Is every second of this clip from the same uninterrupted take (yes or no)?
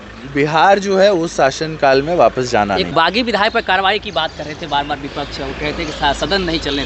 no